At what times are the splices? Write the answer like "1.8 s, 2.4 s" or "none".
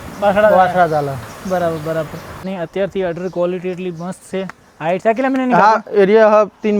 2.4 s